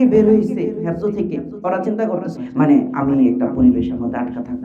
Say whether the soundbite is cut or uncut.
cut